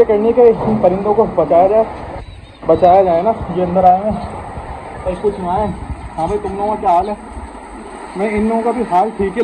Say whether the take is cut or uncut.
uncut